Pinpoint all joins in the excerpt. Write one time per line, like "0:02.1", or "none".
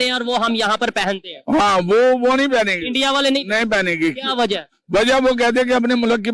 none